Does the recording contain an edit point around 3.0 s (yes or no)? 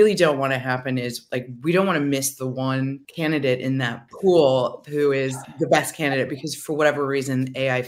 yes